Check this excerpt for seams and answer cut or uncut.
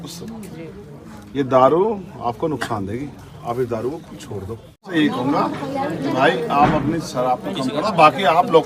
cut